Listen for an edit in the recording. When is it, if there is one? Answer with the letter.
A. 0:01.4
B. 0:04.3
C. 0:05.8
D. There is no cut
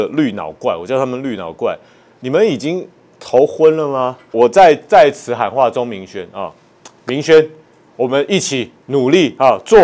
B